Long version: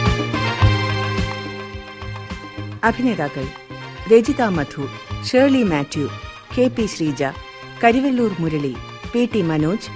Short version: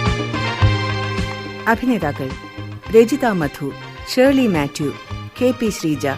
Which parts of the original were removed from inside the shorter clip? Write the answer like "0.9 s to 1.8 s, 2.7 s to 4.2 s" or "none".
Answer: 1.6 s to 2.7 s